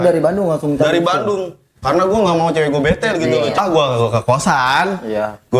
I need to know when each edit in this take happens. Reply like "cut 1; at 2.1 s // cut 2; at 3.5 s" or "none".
cut 1; at 3.6 s

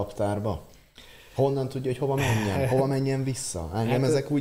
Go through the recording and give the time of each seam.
none

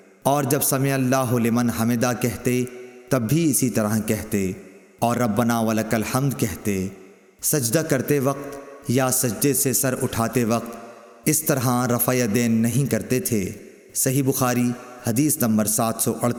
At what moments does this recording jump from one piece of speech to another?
none

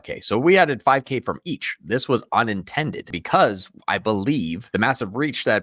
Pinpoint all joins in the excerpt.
cut 1; at 3.1 s // cut 2; at 4.6 s

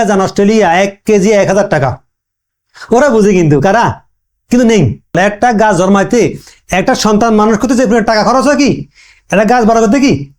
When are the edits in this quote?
cut 1; at 5.2 s

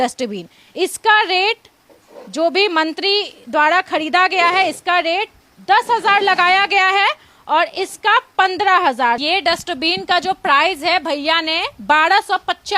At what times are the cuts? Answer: cut 1; at 9.2 s

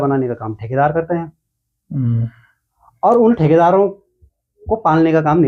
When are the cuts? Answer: none

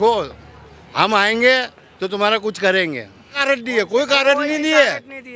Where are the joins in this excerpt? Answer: cut 1; at 3.4 s

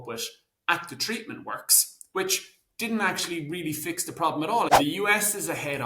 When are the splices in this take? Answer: cut 1; at 4.7 s

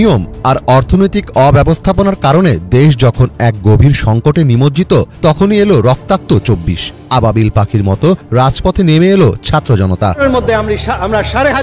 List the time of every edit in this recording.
cut 1; at 10.2 s

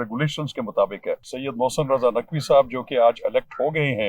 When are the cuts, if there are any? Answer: cut 1; at 1.3 s

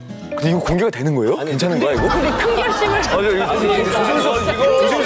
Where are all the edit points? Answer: cut 1; at 3.8 s

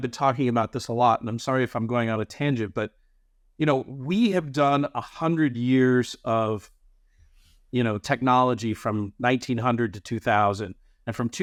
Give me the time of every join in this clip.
none

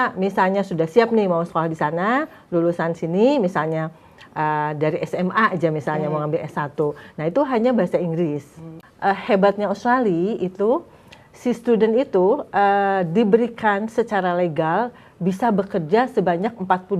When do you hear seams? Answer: cut 1; at 8.7 s

